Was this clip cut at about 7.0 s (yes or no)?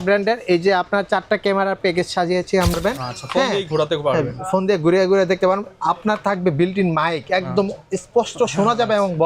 no